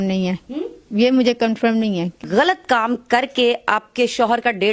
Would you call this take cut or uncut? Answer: cut